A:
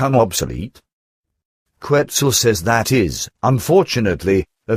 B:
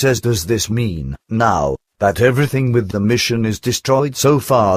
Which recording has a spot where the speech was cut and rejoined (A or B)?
A